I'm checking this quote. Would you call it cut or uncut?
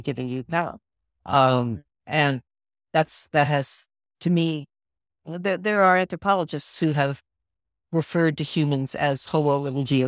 uncut